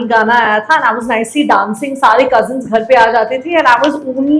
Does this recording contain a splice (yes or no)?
no